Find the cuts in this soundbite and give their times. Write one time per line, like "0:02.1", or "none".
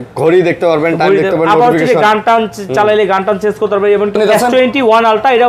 0:04.1